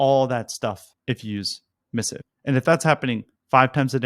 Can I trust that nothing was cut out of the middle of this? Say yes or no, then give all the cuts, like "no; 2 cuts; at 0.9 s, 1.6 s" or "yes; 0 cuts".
no; 2 cuts; at 0.9 s, 2.0 s